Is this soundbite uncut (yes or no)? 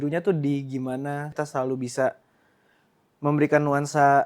no